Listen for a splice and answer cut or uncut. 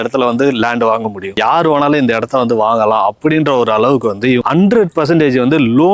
cut